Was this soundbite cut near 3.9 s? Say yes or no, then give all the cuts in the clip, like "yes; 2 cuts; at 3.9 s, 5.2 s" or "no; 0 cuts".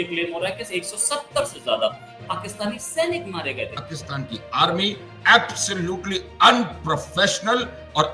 yes; 1 cut; at 3.9 s